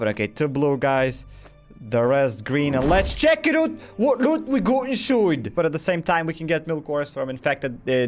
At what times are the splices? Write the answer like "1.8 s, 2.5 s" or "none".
5.5 s